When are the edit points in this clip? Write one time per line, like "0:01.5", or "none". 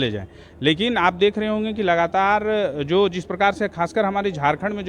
none